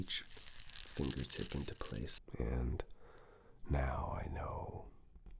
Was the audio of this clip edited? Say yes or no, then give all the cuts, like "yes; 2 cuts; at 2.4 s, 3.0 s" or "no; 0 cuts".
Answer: yes; 1 cut; at 2.2 s